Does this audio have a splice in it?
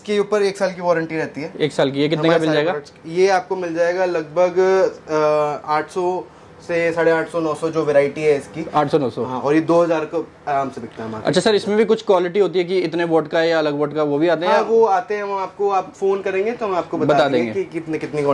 no; 0 cuts

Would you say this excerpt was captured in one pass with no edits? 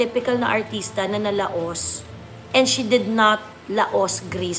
yes; 0 cuts

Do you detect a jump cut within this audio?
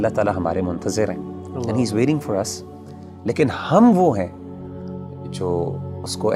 no; 0 cuts

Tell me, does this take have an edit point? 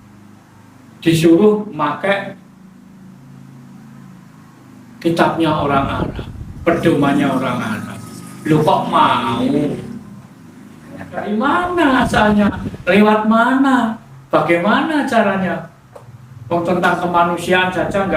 yes; 1 cut; at 11.3 s

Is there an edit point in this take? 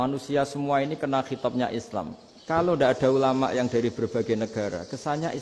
no; 0 cuts

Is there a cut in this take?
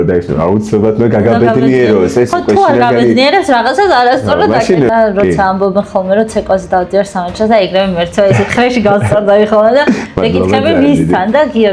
yes; 1 cut; at 4.9 s

